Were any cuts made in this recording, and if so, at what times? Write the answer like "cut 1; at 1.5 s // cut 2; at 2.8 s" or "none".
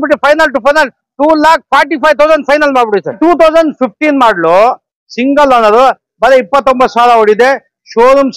cut 1; at 3.2 s